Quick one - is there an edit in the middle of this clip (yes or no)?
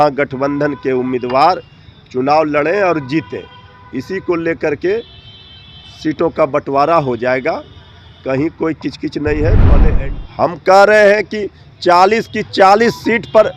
yes